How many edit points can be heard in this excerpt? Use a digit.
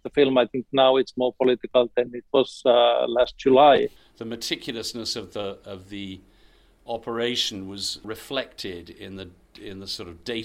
2